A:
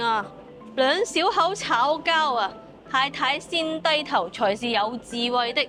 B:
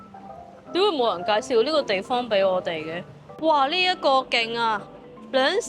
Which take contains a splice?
B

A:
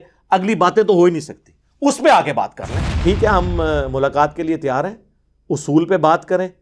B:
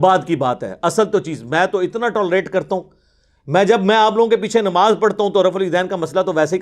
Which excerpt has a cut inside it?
A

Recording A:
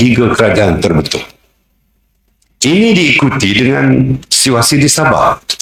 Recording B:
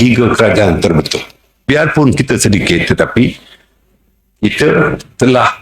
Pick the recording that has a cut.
B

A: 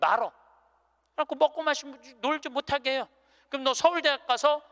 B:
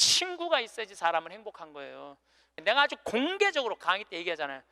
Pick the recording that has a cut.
B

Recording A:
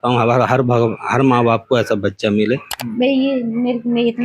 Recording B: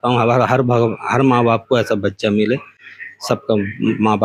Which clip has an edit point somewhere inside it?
A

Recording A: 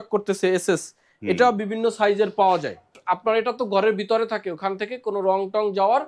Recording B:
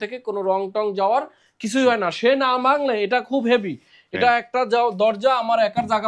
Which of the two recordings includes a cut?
A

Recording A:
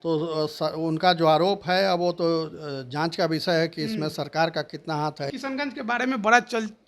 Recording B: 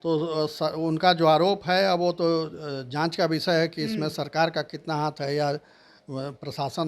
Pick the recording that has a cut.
A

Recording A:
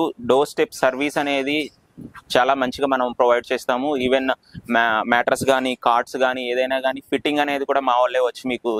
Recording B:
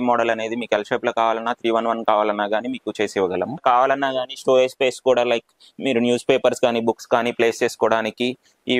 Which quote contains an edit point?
B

